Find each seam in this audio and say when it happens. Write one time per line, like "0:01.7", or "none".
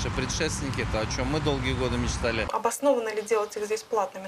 0:02.5